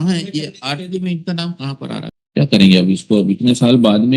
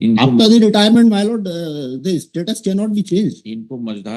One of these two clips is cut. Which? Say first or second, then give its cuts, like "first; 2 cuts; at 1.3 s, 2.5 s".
first; 1 cut; at 2.1 s